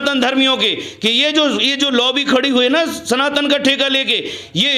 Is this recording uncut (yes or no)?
yes